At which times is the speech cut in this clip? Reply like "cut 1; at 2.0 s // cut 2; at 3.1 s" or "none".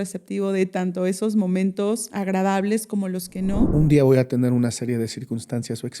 cut 1; at 2.1 s // cut 2; at 3.7 s